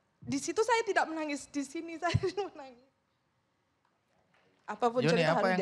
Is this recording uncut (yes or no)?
no